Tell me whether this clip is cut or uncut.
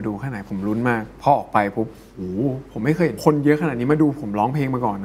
cut